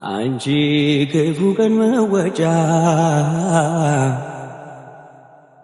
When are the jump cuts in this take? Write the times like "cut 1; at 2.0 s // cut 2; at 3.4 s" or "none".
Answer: none